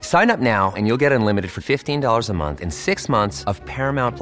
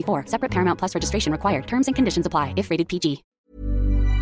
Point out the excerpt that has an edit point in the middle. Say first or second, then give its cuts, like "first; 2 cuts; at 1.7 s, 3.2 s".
second; 1 cut; at 3.3 s